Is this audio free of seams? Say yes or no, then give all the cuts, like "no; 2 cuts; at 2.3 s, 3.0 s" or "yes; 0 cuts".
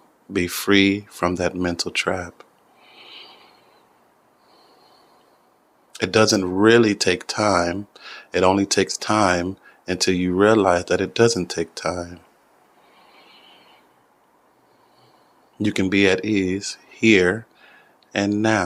yes; 0 cuts